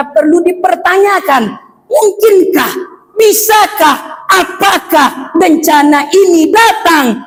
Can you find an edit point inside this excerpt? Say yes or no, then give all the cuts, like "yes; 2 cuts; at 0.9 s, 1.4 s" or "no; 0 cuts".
no; 0 cuts